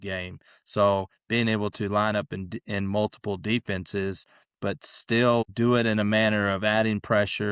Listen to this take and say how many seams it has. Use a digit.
1